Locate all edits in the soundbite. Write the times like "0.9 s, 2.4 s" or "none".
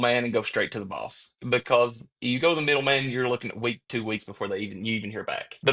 none